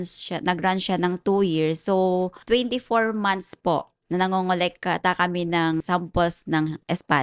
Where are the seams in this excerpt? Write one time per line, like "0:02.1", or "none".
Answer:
0:02.4
0:04.0
0:05.8

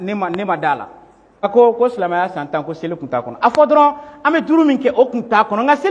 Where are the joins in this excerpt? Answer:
0:01.4

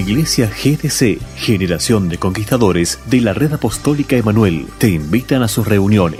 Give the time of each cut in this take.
none

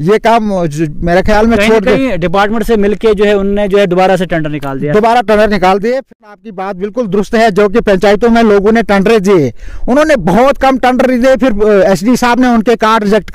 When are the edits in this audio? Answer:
0:06.1

